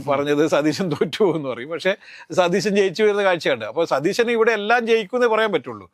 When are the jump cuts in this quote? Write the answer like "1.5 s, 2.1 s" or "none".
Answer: none